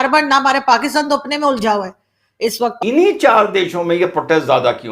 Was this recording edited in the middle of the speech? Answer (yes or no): yes